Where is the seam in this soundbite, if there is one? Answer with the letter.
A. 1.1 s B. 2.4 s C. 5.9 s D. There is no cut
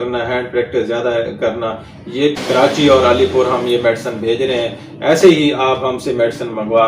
B